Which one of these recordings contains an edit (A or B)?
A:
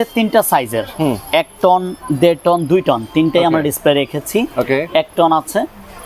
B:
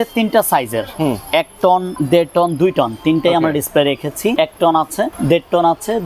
B